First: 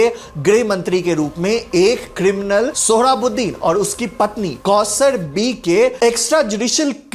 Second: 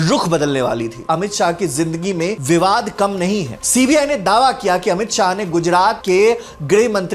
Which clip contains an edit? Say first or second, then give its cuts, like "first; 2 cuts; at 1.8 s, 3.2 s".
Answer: second; 2 cuts; at 1.0 s, 3.6 s